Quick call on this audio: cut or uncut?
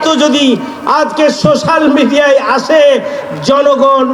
uncut